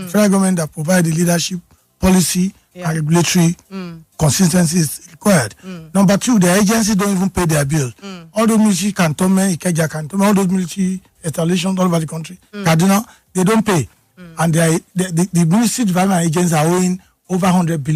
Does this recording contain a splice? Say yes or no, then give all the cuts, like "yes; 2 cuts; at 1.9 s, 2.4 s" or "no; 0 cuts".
no; 0 cuts